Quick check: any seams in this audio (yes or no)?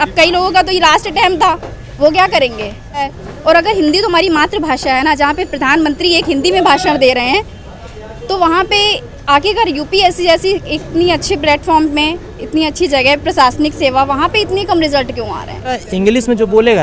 yes